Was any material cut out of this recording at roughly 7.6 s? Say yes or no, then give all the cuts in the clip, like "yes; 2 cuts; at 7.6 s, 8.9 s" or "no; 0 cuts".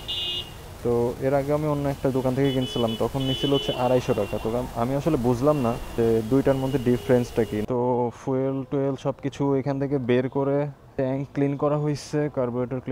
yes; 2 cuts; at 5.9 s, 7.6 s